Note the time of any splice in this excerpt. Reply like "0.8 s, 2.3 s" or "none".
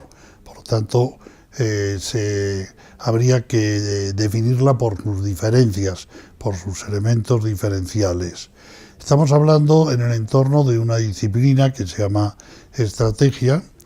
3.5 s